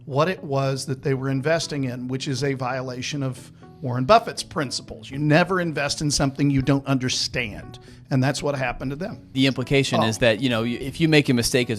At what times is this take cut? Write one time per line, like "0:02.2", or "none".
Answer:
0:09.2
0:10.8